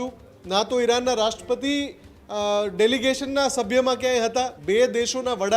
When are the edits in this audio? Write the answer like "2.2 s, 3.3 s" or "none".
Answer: 4.6 s